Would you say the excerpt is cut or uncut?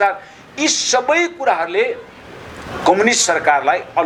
uncut